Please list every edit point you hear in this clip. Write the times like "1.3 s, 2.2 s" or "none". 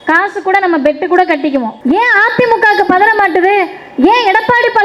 1.7 s